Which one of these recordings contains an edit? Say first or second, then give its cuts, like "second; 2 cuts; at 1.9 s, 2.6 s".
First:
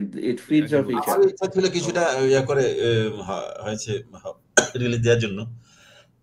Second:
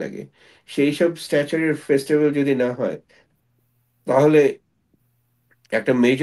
first; 1 cut; at 1.0 s